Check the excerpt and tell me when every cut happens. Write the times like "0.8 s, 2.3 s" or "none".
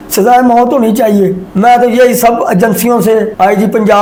none